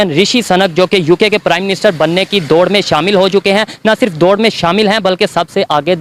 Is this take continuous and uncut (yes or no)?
yes